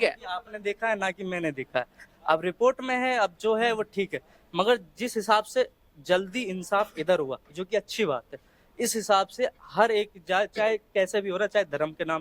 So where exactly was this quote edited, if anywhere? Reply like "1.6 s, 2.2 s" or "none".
none